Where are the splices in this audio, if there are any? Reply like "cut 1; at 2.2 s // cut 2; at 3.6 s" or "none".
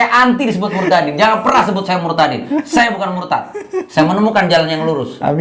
none